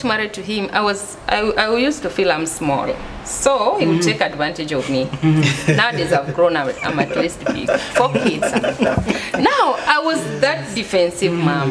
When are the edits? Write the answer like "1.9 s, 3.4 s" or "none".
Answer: none